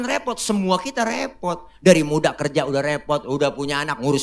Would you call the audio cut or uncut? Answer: uncut